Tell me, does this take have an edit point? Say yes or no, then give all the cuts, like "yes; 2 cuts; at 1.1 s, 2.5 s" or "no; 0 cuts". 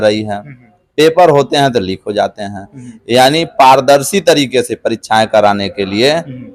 no; 0 cuts